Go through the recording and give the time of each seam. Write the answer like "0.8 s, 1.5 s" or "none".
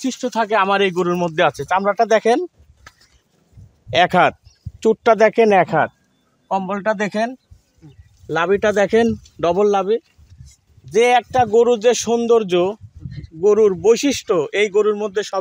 none